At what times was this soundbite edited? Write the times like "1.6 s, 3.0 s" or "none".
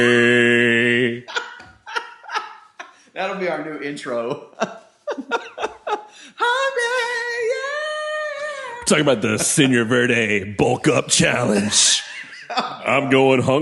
none